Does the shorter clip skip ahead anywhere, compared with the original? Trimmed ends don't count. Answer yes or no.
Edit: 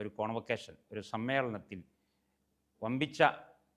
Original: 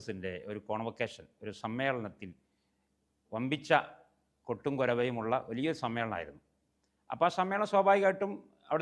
no